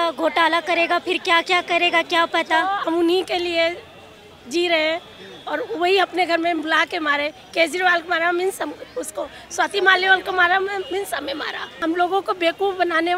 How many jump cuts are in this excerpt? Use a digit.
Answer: 2